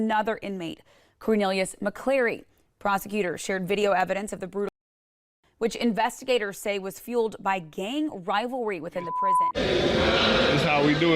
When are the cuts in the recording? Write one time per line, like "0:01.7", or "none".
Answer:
0:09.4